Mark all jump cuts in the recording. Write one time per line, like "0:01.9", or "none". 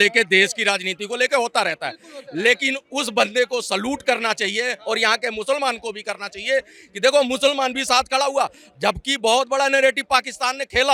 none